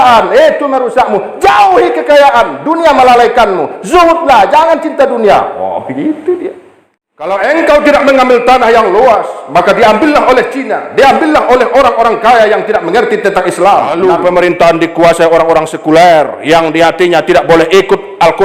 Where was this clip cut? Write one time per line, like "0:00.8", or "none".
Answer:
0:07.3
0:13.9